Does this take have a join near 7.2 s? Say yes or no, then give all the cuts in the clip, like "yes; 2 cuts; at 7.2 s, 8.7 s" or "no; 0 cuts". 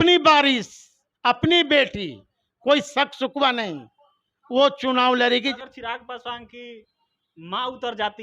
no; 1 cut; at 5.5 s